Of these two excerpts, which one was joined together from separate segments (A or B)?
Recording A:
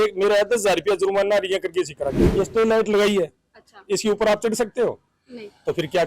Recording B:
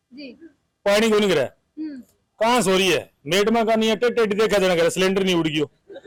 A